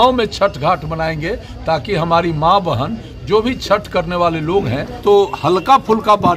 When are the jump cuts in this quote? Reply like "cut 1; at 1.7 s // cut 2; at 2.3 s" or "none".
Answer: cut 1; at 5.0 s